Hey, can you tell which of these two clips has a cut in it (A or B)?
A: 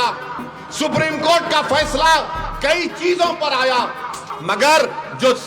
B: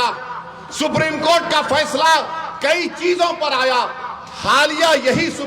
A